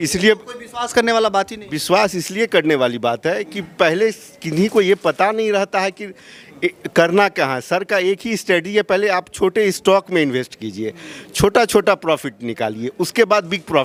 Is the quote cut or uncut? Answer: uncut